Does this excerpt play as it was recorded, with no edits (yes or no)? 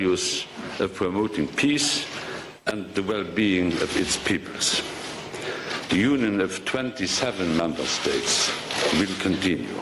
no